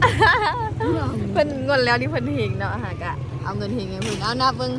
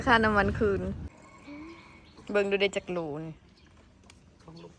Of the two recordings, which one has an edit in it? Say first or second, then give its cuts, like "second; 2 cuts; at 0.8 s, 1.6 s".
second; 1 cut; at 1.0 s